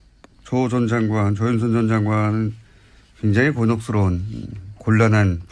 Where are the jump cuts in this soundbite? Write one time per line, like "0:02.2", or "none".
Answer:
0:01.6